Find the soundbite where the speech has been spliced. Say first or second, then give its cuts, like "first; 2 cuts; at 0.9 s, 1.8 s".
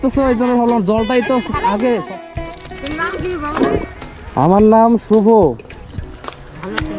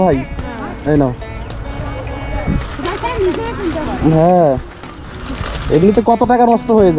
first; 1 cut; at 2.2 s